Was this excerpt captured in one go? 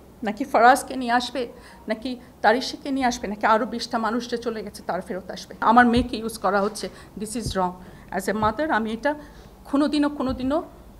no; 1 cut; at 5.6 s

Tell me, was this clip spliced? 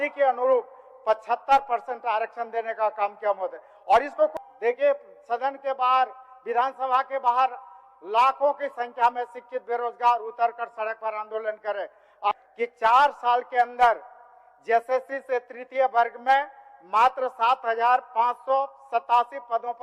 yes; 2 cuts; at 4.3 s, 12.3 s

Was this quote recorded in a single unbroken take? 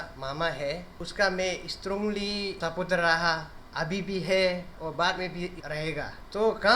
no; 4 cuts; at 1.0 s, 2.6 s, 4.7 s, 5.7 s

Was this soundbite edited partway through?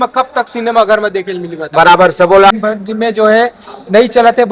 yes; 1 cut; at 2.5 s

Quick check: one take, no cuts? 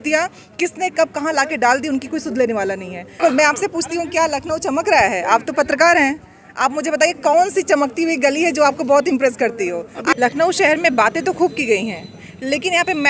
no; 2 cuts; at 3.2 s, 10.1 s

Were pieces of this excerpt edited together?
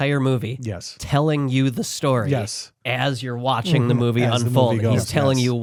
no; 0 cuts

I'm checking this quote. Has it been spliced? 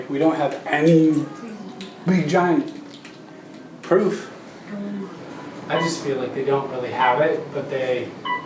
yes; 1 cut; at 5.2 s

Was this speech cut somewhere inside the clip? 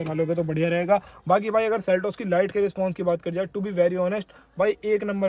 no; 0 cuts

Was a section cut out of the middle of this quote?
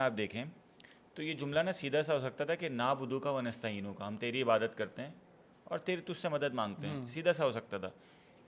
no; 0 cuts

